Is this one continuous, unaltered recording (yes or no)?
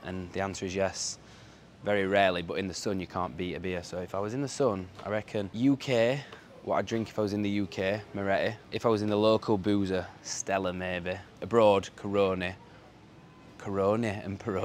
no